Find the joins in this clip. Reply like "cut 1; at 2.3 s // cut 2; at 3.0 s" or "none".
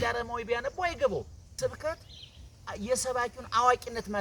cut 1; at 1.4 s

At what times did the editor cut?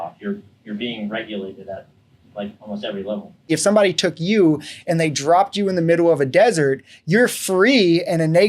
cut 1; at 3.4 s

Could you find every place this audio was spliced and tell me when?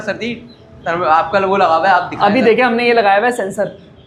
none

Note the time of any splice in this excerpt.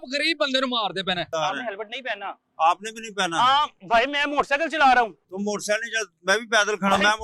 cut 1; at 1.3 s

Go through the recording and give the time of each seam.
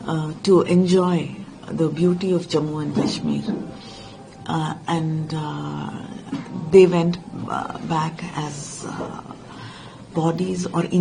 none

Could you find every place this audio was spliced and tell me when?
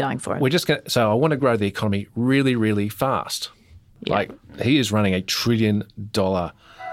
cut 1; at 3.9 s

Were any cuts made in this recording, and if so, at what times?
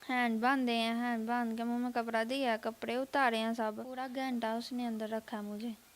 cut 1; at 3.9 s

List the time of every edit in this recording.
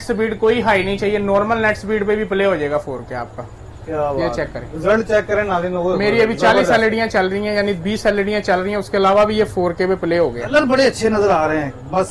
none

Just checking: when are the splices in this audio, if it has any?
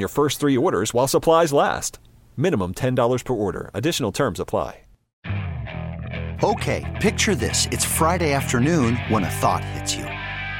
cut 1; at 5.0 s

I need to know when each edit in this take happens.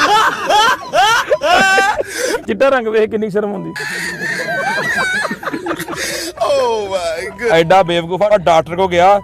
cut 1; at 2.4 s

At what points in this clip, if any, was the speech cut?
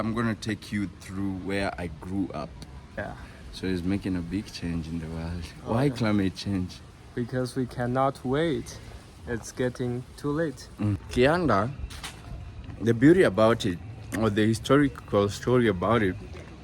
cut 1; at 3.0 s // cut 2; at 11.0 s

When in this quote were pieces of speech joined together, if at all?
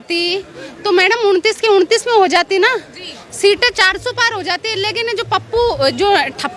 none

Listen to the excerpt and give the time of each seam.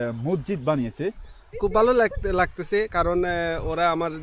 cut 1; at 1.5 s

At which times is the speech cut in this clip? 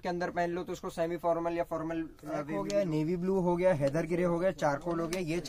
cut 1; at 2.6 s

